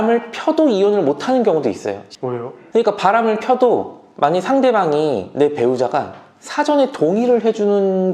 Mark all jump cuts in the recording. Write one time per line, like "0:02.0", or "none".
0:02.1